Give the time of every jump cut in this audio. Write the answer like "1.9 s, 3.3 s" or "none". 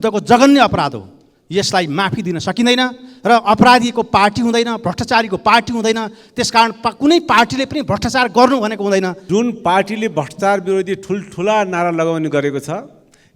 9.2 s